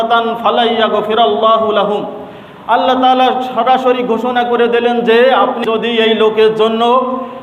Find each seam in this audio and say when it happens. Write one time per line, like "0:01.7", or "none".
0:05.6